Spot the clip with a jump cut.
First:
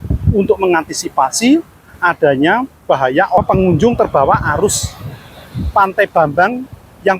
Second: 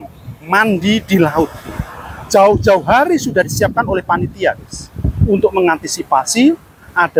first; 1 cut; at 3.4 s

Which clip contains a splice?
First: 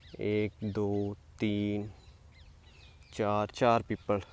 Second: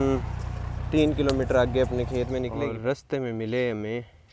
second; 1 cut; at 2.5 s

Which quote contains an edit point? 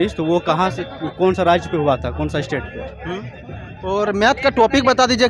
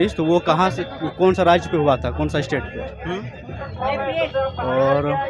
second; 1 cut; at 3.7 s

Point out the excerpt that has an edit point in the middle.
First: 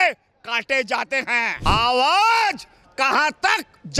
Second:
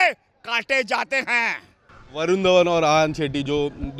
first; 1 cut; at 1.5 s

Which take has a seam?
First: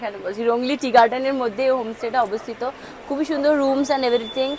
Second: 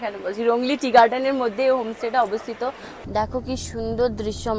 second; 1 cut; at 2.9 s

